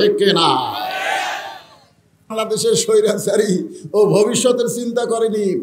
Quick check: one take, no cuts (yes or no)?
no